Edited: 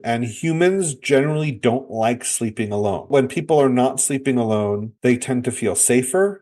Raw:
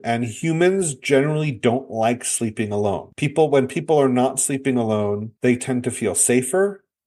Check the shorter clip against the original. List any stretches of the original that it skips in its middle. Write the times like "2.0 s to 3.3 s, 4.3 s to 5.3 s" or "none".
3.1 s to 3.5 s